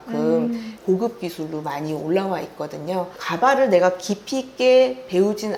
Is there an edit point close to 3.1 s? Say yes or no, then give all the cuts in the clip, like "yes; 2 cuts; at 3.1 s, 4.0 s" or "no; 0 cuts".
no; 0 cuts